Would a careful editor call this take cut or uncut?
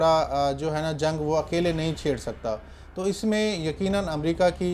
uncut